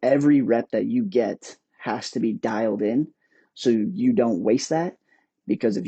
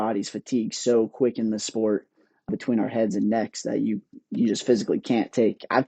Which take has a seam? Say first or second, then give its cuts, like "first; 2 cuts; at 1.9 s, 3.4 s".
second; 1 cut; at 2.5 s